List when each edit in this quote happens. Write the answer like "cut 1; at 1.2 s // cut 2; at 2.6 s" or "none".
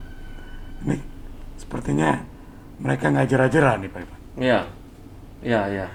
none